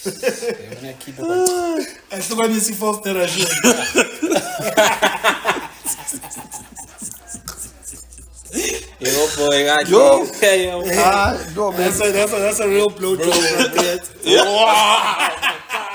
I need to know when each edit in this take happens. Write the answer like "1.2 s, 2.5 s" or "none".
none